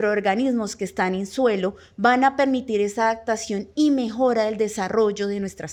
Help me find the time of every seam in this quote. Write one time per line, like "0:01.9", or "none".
none